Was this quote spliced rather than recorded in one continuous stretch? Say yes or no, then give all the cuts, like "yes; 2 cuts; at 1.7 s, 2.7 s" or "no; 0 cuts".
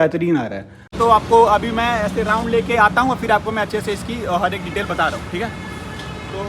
yes; 1 cut; at 0.9 s